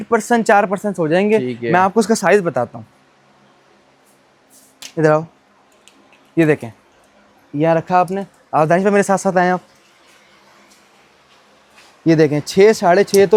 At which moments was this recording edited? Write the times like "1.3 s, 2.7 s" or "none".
none